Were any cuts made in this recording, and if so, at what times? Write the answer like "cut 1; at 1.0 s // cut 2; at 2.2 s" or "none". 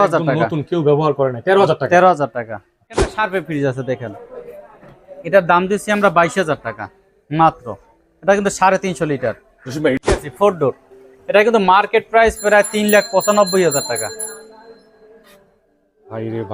cut 1; at 3.1 s // cut 2; at 10.2 s

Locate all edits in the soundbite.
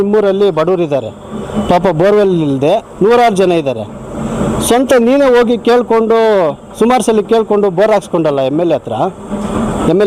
none

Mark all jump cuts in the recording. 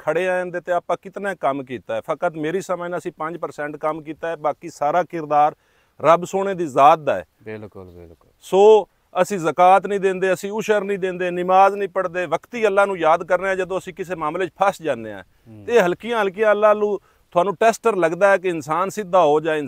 none

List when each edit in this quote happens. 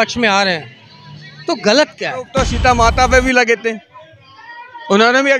cut 1; at 2.3 s

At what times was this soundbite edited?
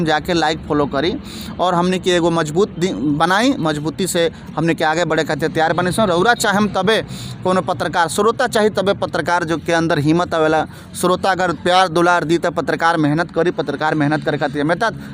none

